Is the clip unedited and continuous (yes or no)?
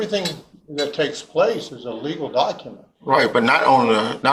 yes